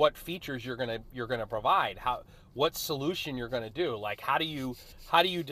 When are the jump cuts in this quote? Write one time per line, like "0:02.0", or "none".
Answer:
none